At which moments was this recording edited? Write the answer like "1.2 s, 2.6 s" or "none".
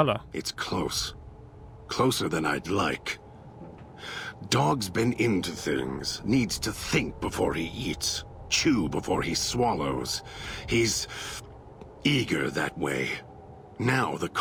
none